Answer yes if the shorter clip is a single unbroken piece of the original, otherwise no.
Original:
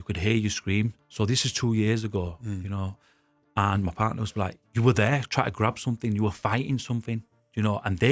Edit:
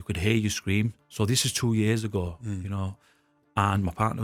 yes